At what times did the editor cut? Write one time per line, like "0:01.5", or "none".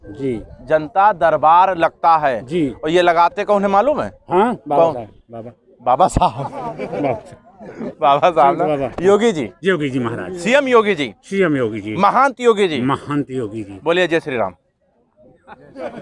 none